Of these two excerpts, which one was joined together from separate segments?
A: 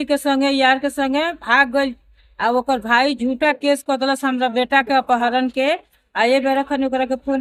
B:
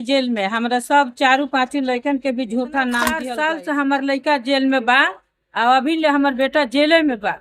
B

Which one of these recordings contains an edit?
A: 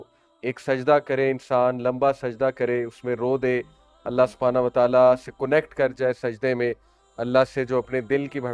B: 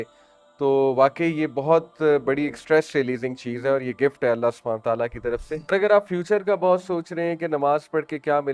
B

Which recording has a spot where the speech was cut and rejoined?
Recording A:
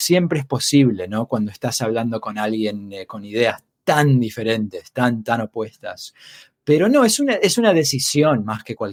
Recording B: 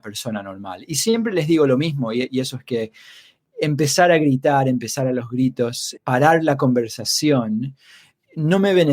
B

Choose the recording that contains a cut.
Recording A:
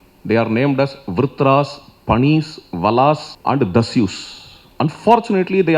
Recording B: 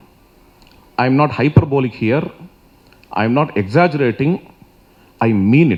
A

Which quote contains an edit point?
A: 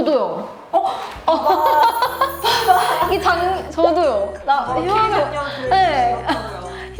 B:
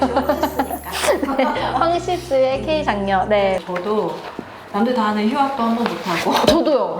B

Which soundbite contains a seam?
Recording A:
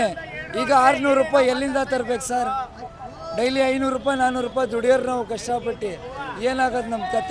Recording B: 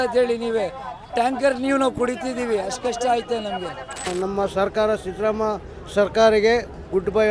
B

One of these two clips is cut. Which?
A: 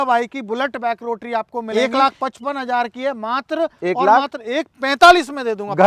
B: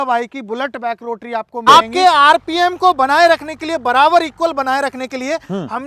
B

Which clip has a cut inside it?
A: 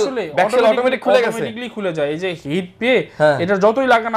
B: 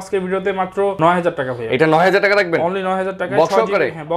B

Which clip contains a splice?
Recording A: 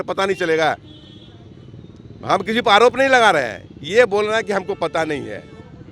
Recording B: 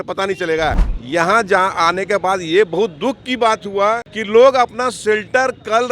B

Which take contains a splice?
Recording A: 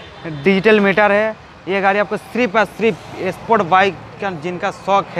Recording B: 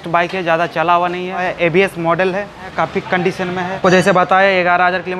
B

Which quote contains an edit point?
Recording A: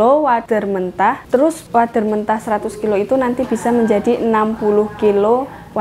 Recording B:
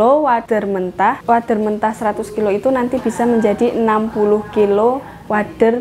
B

